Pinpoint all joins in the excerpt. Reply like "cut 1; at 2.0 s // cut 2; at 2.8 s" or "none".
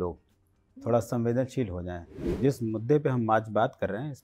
cut 1; at 2.2 s